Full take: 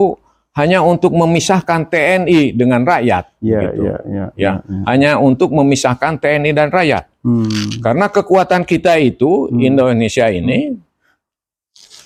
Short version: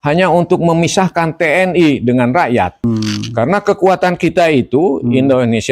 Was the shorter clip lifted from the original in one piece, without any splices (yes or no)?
no